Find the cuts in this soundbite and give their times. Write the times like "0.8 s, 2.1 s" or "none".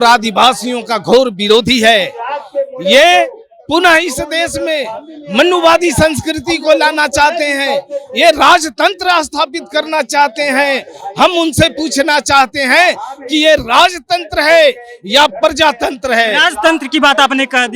none